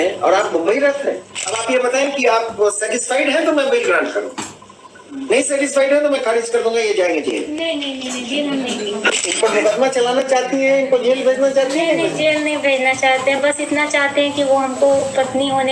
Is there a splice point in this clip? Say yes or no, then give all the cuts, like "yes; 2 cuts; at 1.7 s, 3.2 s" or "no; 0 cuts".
yes; 2 cuts; at 1.6 s, 9.3 s